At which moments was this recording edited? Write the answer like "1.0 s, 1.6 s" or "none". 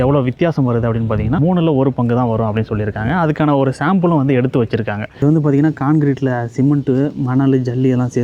1.4 s, 5.1 s